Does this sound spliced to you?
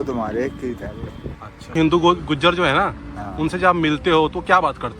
yes; 1 cut; at 1.7 s

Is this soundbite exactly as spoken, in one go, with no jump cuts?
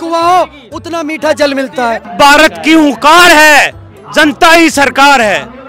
yes; 0 cuts

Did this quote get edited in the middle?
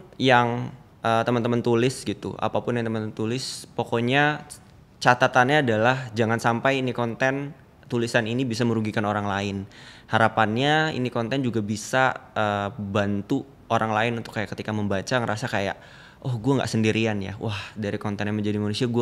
no; 0 cuts

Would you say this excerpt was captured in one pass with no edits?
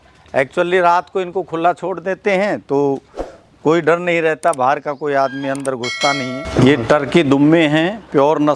no; 1 cut; at 6.4 s

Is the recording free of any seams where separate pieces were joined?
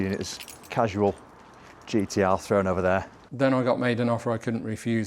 no; 1 cut; at 3.2 s

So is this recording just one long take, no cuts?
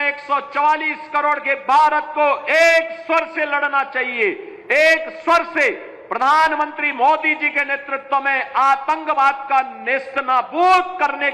yes; 0 cuts

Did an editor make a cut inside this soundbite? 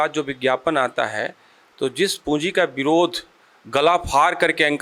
no; 0 cuts

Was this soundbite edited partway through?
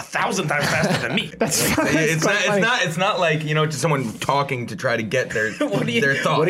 yes; 1 cut; at 1.3 s

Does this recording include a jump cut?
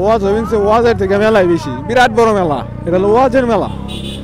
no; 0 cuts

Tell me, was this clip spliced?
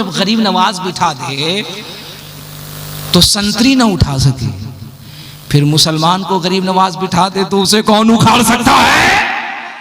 no; 0 cuts

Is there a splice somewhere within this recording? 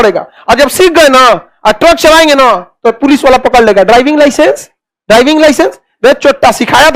no; 0 cuts

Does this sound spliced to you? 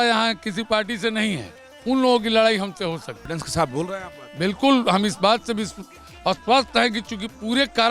yes; 1 cut; at 3.1 s

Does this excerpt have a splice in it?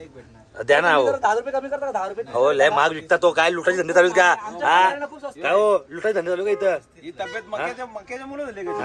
no; 0 cuts

